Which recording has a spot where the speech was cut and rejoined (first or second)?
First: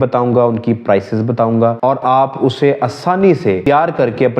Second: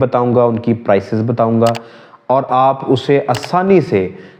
first